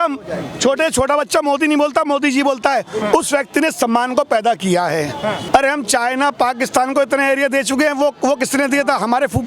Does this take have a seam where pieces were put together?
yes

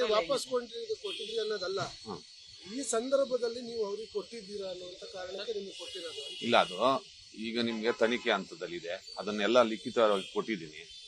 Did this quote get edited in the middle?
yes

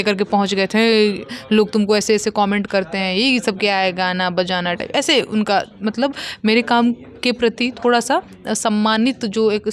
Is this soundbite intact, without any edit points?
yes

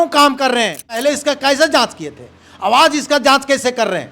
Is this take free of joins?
no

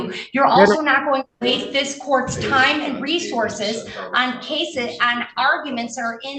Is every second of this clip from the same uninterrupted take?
yes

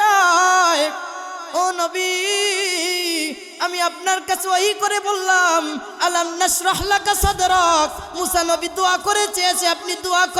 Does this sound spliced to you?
no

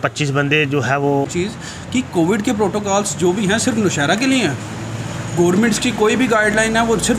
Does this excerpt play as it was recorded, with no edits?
no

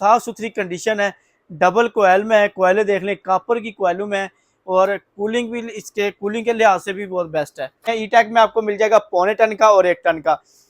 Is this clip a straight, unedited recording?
no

